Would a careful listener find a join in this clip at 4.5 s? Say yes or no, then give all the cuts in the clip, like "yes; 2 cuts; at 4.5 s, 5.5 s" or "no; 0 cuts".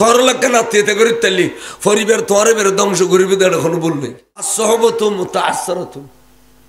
yes; 1 cut; at 4.5 s